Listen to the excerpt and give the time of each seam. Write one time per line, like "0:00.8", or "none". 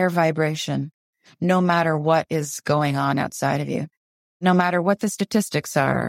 0:04.0